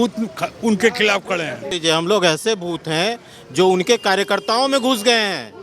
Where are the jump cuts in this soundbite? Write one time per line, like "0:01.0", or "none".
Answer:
0:01.7